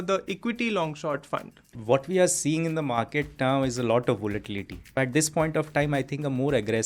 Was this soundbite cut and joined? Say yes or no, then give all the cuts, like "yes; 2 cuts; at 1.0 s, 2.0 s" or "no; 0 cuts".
yes; 2 cuts; at 1.8 s, 5.0 s